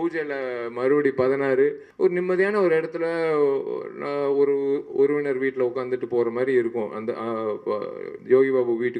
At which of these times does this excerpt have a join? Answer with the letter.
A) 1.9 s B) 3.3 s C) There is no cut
A